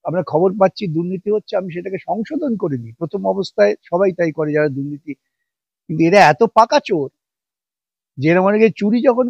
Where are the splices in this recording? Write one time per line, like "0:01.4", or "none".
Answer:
none